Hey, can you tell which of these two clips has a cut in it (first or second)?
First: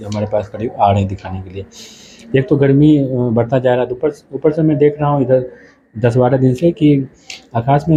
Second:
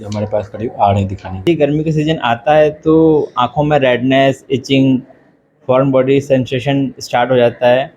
second